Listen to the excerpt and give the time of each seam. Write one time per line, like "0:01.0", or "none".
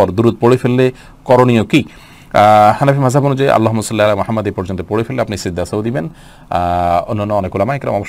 none